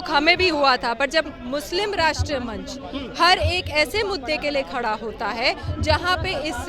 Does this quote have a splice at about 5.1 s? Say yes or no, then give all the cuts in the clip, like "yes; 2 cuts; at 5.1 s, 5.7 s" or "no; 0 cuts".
no; 1 cut; at 1.4 s